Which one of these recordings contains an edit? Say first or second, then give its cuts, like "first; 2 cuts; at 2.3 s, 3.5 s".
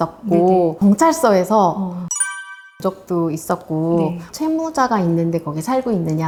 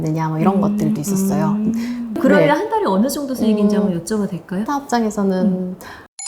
second; 1 cut; at 2.2 s